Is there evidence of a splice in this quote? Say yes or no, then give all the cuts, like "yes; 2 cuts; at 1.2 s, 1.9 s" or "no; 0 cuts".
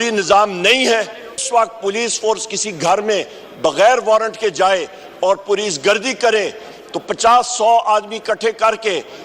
yes; 1 cut; at 1.4 s